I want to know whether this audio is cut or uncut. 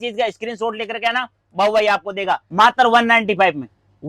cut